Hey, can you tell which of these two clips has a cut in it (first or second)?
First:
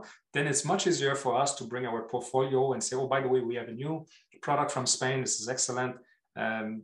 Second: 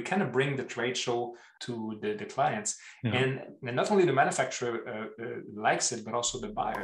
second